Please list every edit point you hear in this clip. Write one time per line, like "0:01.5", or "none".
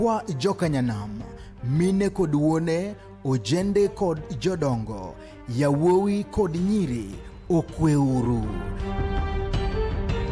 0:04.6
0:08.3

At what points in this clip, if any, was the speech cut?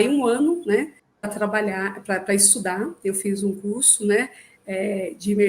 0:01.0

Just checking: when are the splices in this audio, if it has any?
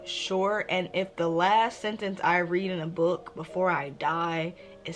none

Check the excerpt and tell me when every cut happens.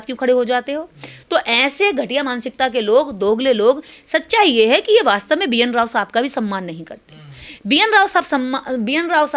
none

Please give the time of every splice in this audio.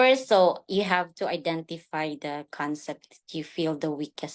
none

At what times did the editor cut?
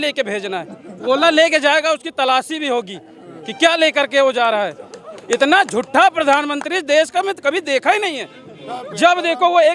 0:01.1

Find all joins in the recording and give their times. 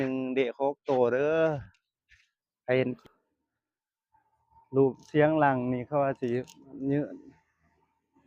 0:03.0

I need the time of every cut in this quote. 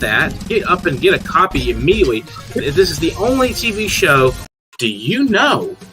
0:04.4

